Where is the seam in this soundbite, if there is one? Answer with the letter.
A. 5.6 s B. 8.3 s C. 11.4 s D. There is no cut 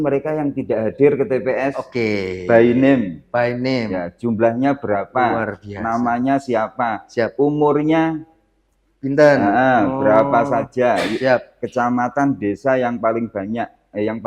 D